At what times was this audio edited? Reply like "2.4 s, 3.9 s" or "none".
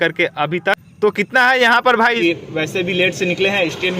2.2 s

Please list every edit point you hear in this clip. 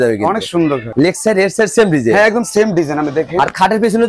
none

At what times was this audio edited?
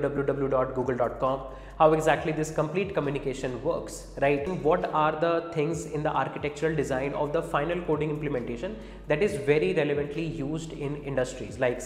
4.5 s

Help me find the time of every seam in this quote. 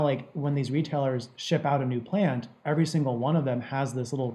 none

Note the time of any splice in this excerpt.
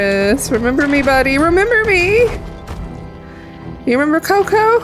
none

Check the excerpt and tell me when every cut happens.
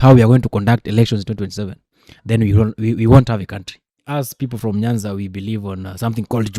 4.0 s

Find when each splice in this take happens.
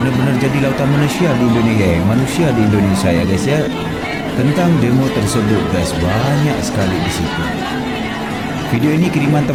none

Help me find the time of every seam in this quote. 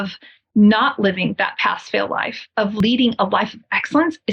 2.8 s

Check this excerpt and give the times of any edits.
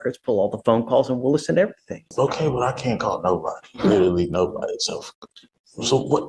2.1 s

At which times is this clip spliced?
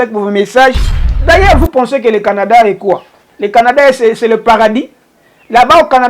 0.9 s

